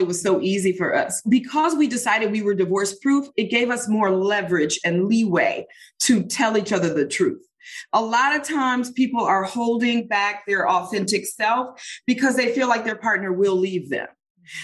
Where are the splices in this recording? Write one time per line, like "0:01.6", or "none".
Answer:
0:01.2